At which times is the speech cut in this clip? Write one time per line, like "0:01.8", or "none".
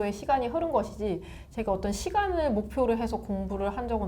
none